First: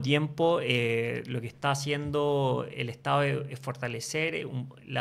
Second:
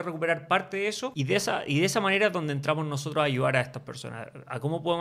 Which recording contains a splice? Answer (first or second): second